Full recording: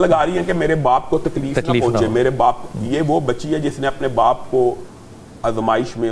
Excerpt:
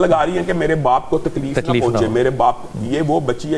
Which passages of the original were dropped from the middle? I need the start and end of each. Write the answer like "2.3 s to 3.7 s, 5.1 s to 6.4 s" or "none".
none